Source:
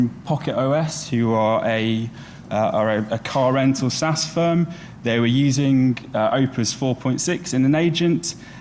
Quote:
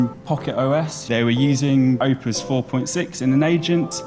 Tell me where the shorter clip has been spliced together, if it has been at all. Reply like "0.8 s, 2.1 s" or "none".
1.0 s, 2.0 s